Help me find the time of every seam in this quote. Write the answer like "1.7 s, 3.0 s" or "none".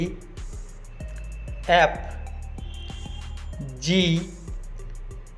none